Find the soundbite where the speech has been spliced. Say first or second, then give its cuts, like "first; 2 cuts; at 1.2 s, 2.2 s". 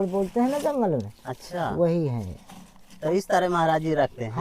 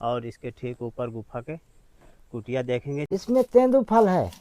second; 1 cut; at 3.0 s